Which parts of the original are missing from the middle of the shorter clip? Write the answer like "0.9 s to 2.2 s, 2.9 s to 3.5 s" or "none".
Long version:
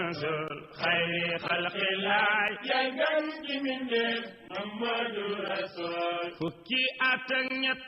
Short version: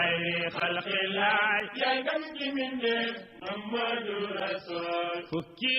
3.0 s to 3.2 s